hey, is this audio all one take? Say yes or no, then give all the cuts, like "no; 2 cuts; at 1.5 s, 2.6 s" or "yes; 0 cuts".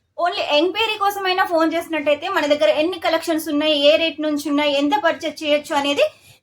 yes; 0 cuts